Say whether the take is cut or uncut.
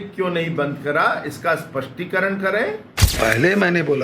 cut